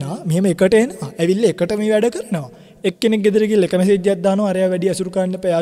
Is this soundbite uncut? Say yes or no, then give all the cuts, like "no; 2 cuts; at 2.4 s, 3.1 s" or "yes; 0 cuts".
yes; 0 cuts